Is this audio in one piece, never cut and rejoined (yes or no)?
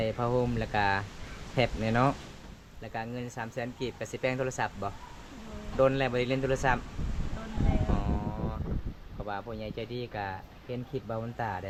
yes